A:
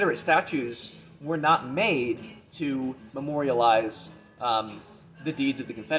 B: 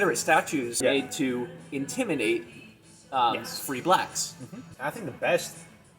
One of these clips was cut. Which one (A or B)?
B